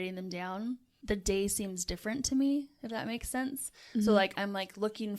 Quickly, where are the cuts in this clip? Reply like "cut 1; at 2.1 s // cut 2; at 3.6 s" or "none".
cut 1; at 0.9 s